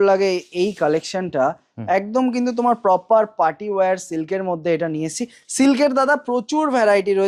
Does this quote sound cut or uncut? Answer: uncut